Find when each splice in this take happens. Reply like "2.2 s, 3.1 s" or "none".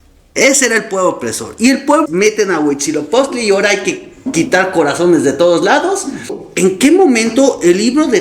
2.0 s, 6.4 s